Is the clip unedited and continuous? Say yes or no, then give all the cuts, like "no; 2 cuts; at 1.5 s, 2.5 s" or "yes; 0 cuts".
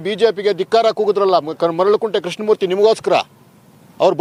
yes; 0 cuts